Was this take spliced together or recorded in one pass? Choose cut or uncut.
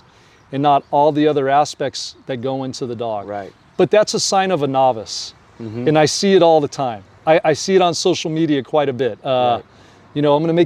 uncut